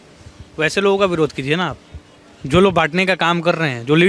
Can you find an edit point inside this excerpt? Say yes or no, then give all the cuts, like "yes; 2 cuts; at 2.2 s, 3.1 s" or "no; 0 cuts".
no; 0 cuts